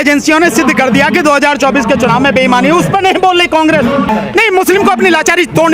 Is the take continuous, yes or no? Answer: no